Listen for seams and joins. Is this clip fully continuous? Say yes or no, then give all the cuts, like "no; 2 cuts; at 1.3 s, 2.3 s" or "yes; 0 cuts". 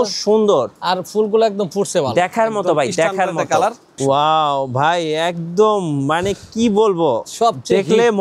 no; 1 cut; at 3.9 s